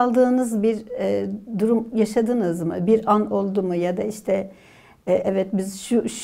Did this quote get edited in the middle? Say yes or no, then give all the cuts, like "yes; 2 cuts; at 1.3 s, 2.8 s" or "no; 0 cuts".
no; 0 cuts